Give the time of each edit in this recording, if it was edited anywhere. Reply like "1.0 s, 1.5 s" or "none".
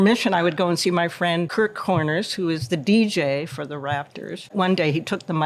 1.5 s, 4.5 s